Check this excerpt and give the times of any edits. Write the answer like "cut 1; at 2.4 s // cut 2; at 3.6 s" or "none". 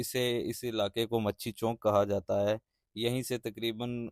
none